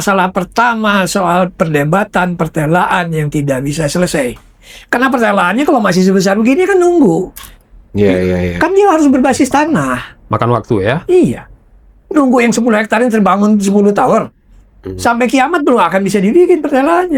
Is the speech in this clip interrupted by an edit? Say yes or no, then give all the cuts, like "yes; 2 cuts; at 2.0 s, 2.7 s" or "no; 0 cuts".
no; 0 cuts